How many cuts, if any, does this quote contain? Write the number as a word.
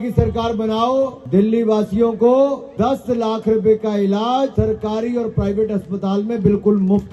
three